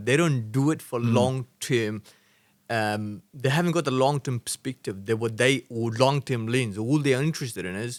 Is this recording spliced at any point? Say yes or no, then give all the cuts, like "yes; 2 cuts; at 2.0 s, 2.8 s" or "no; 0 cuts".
no; 0 cuts